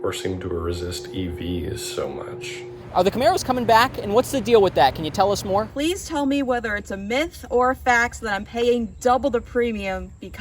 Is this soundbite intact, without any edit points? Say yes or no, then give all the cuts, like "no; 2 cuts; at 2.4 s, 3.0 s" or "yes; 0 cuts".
no; 2 cuts; at 2.7 s, 5.7 s